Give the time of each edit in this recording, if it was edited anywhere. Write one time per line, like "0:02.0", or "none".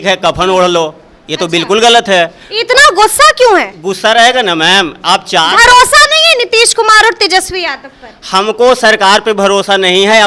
none